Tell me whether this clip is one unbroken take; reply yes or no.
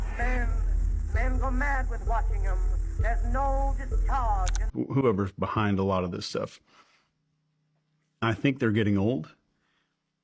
no